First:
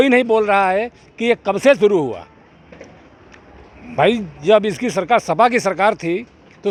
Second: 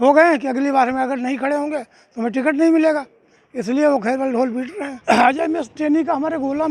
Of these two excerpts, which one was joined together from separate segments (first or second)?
second